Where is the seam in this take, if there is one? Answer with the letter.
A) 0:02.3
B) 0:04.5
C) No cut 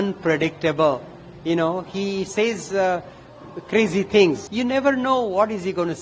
B